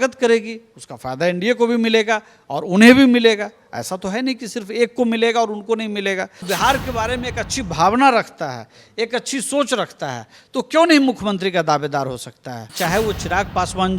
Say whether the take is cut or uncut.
cut